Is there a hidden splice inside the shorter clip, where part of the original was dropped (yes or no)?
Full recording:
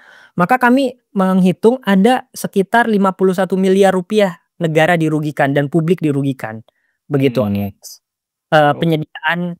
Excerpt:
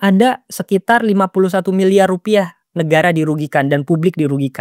no